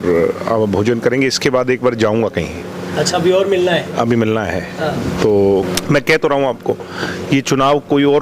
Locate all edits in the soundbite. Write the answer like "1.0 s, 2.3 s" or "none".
5.7 s